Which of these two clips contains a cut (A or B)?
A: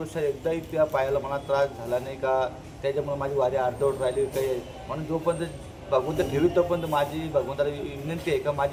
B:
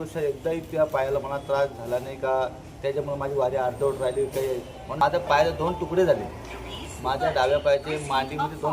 B